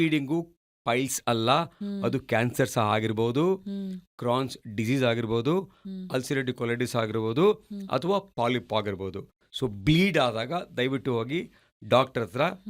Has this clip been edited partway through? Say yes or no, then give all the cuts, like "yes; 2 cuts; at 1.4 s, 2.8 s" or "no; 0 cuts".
no; 0 cuts